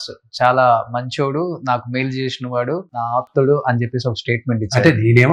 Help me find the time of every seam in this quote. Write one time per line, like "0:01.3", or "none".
0:03.0

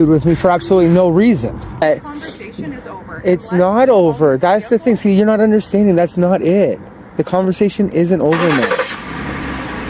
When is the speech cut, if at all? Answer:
0:01.8

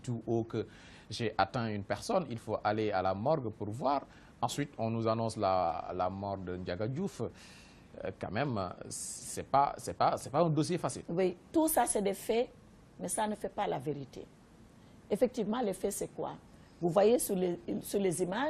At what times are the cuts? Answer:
0:01.1

